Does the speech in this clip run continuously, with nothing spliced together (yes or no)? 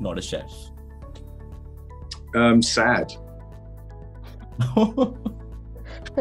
yes